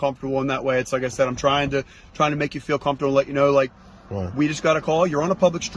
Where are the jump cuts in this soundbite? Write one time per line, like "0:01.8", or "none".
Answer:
none